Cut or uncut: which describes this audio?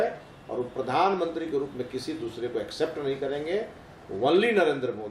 uncut